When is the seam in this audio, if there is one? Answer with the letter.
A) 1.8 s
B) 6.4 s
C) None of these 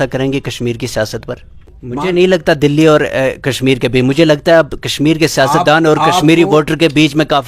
A